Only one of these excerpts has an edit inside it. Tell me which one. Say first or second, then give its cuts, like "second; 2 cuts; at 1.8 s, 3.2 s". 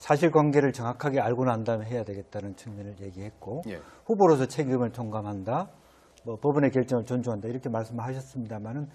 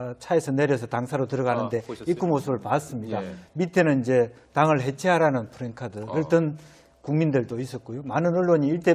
second; 1 cut; at 7.8 s